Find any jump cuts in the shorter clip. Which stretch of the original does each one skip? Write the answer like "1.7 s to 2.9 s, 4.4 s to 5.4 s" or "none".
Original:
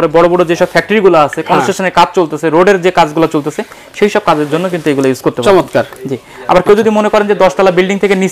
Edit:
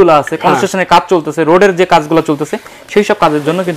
none